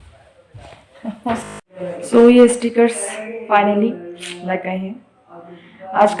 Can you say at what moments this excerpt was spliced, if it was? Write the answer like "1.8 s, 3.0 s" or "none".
1.7 s